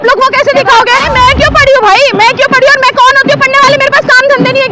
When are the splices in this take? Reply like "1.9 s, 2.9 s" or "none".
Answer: 1.1 s